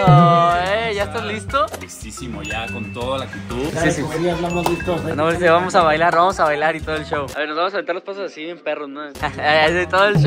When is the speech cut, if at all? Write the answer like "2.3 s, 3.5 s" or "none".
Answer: 3.7 s